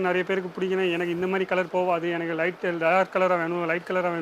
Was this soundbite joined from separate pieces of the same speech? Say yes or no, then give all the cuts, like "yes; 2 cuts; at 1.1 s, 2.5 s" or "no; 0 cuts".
no; 0 cuts